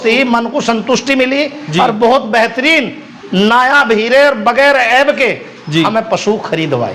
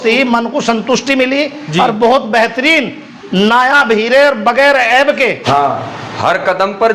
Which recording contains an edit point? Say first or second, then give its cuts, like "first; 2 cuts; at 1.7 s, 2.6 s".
second; 1 cut; at 5.4 s